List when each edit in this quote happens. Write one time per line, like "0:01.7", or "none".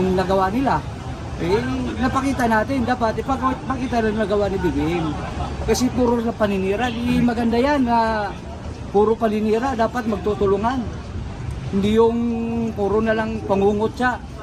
none